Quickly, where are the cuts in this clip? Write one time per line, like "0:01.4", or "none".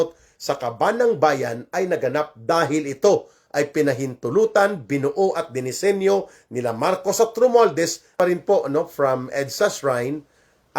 0:08.1